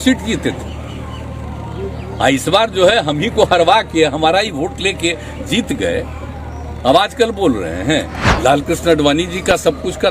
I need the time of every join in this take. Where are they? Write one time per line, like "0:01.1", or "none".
0:08.2